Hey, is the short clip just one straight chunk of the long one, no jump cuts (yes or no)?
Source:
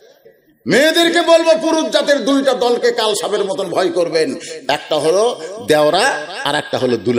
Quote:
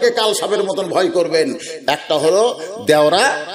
yes